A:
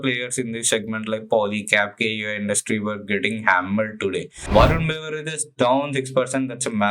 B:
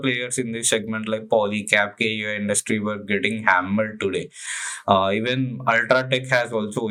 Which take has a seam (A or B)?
A